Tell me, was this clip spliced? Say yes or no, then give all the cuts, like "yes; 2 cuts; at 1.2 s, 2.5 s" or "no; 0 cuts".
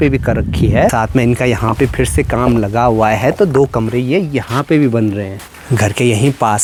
no; 0 cuts